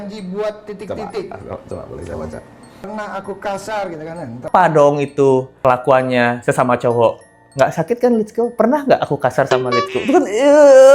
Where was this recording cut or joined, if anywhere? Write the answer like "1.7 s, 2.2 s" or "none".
4.5 s

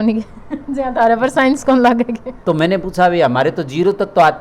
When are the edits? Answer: 2.3 s

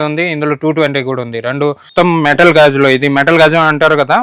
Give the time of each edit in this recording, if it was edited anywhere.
1.8 s

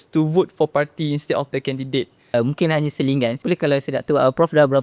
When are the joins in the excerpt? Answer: 2.3 s, 3.4 s

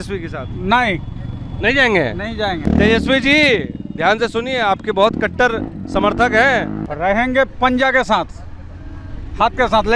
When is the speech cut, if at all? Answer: 2.6 s, 6.8 s

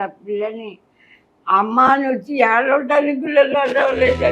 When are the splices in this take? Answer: none

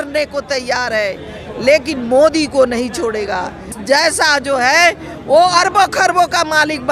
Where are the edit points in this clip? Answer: 3.7 s

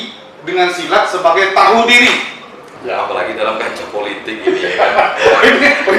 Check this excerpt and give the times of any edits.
2.5 s

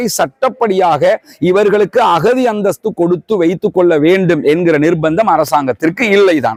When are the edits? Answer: none

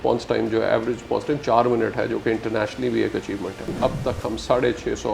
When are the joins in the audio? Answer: 3.7 s

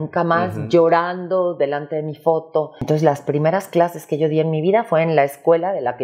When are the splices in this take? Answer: 2.8 s

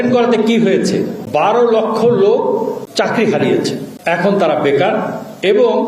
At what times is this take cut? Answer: 3.9 s

